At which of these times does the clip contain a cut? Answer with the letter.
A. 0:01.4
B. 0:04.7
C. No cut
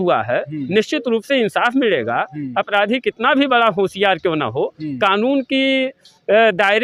C